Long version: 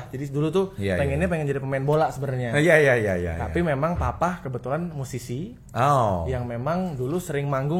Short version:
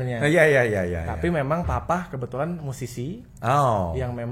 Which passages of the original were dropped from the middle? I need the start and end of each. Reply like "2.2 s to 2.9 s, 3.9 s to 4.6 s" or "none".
none